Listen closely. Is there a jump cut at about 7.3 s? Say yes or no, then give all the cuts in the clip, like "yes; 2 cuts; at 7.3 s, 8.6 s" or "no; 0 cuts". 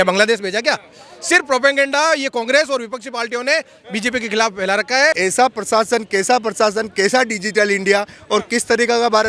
no; 1 cut; at 5.2 s